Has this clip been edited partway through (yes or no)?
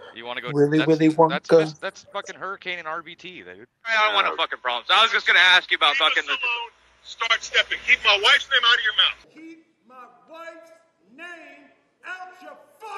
yes